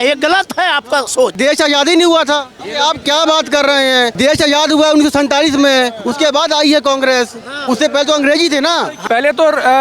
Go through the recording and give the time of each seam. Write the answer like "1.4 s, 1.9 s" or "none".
1.3 s, 2.5 s, 4.1 s, 9.0 s